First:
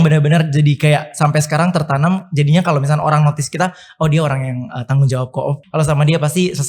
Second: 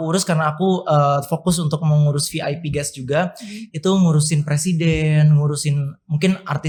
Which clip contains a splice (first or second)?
first